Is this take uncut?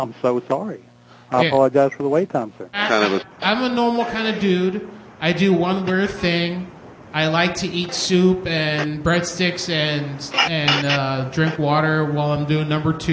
no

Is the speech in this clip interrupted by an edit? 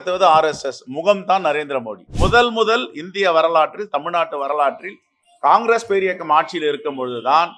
yes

